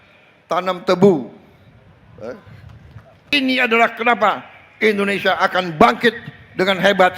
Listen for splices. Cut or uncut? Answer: cut